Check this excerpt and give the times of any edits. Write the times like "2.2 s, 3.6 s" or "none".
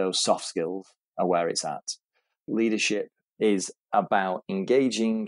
2.4 s